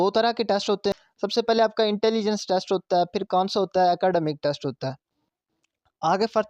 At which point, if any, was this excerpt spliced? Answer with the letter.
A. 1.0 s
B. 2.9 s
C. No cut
A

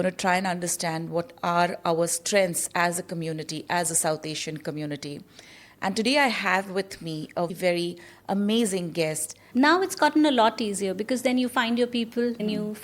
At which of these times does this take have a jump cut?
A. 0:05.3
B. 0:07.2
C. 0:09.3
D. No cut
C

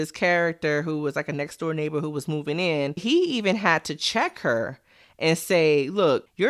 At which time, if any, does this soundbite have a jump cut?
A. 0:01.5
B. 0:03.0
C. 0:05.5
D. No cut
B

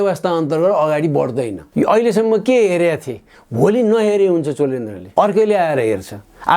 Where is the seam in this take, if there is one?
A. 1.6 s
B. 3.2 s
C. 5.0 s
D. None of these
A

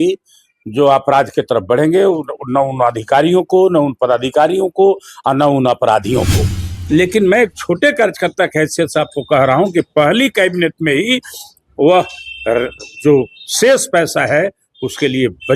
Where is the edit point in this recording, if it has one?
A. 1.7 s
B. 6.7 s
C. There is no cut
B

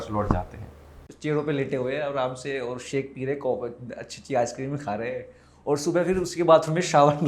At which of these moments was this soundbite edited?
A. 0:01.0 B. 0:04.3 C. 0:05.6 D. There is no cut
A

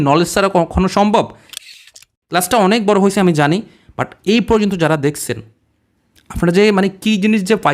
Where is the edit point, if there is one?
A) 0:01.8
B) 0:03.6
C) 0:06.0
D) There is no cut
A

